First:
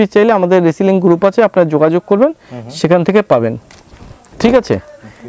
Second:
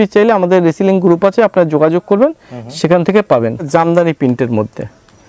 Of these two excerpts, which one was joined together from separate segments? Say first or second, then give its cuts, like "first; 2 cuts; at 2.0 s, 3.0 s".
second; 1 cut; at 3.6 s